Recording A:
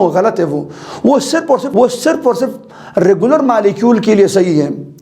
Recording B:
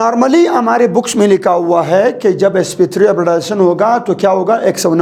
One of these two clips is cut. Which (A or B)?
A